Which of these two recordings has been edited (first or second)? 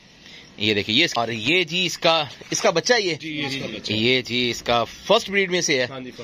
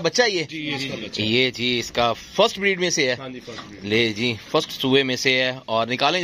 first